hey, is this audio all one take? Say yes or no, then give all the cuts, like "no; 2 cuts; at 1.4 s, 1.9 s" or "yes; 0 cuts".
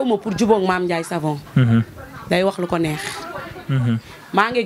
no; 1 cut; at 3.6 s